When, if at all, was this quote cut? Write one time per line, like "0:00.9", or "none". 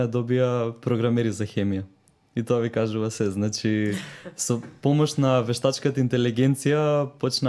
none